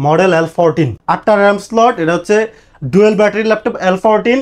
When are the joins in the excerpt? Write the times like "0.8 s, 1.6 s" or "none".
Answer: 1.0 s